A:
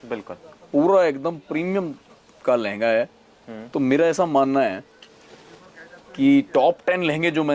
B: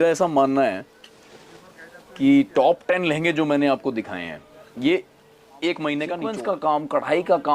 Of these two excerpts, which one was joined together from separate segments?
B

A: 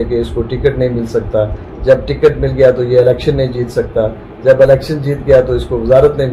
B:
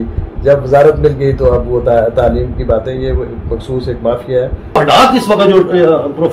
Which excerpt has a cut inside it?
B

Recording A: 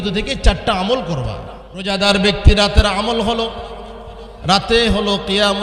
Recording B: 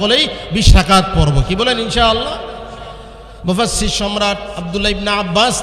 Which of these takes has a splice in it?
A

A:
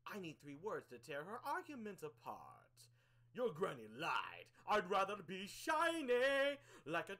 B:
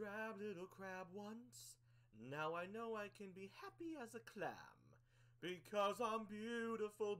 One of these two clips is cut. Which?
A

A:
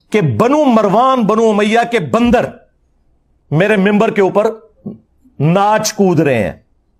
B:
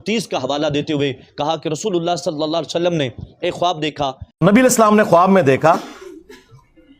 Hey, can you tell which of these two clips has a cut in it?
B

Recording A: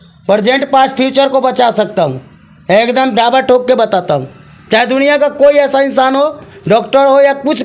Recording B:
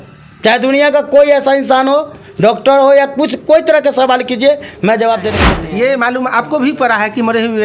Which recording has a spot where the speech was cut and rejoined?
B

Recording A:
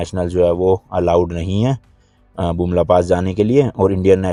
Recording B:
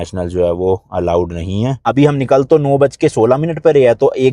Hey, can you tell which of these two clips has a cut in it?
B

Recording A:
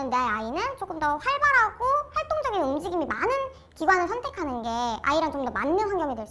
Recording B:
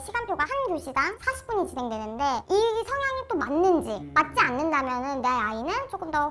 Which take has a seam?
B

